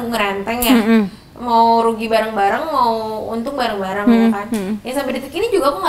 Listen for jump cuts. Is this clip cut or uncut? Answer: uncut